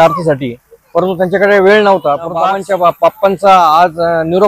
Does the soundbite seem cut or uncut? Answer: cut